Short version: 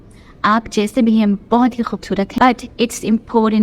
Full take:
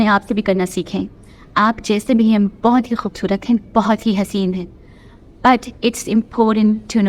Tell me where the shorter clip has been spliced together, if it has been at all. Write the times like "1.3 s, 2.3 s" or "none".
2.3 s